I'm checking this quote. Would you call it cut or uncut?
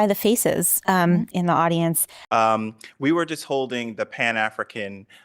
cut